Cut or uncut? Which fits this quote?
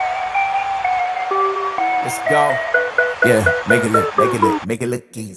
uncut